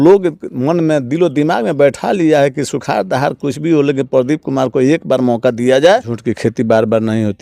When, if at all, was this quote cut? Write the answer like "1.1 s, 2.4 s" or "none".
6.2 s